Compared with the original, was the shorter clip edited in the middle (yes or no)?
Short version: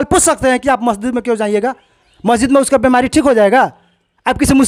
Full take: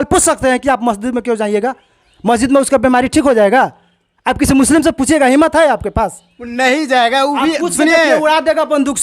no